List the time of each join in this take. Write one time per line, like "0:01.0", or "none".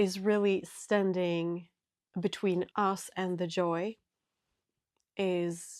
0:02.7